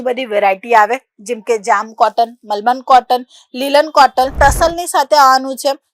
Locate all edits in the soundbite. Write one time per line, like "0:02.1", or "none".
0:04.3